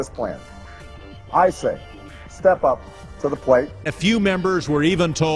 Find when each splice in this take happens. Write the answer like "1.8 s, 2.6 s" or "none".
4.0 s